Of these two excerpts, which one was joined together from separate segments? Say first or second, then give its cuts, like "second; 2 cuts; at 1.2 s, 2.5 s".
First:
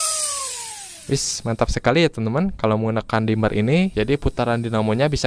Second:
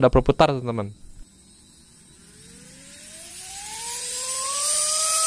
first; 1 cut; at 0.9 s